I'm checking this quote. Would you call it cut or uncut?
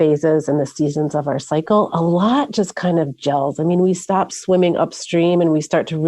uncut